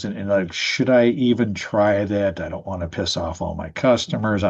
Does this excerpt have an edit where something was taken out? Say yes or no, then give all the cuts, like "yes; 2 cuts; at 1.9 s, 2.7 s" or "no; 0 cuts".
no; 0 cuts